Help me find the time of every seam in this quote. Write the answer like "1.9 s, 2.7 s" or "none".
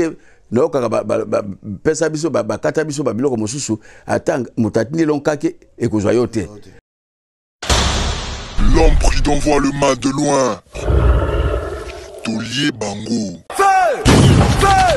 6.9 s